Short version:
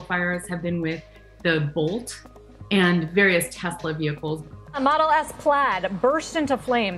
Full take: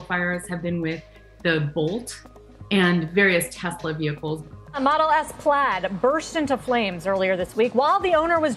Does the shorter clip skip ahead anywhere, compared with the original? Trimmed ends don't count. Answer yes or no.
no